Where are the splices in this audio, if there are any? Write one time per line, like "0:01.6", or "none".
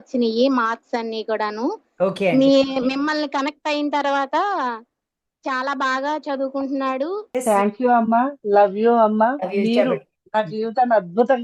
0:07.3